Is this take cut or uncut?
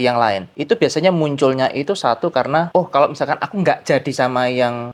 uncut